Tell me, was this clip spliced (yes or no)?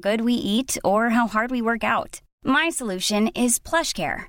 no